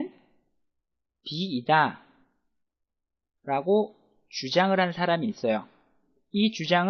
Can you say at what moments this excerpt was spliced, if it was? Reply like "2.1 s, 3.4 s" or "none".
4.9 s